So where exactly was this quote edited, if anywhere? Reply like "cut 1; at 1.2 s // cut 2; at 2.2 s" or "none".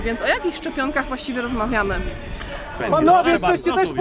cut 1; at 2.8 s